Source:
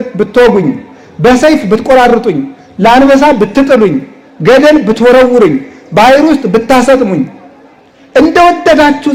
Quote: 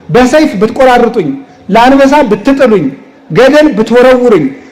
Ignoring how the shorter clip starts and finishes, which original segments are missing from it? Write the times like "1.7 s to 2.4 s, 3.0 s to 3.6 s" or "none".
none

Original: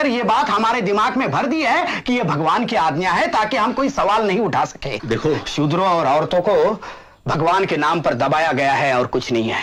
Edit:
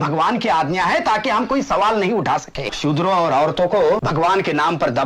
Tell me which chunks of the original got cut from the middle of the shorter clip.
5.0 s to 5.5 s, 6.8 s to 7.3 s

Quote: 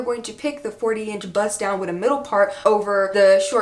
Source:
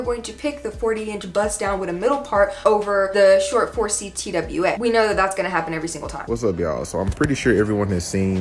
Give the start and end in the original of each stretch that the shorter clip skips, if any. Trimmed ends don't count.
none

